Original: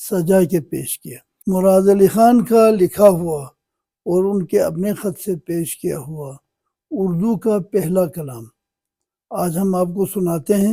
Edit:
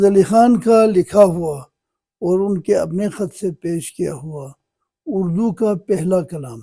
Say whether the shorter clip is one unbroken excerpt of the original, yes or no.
yes